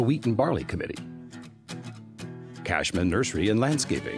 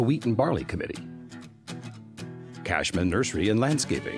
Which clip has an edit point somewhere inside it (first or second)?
second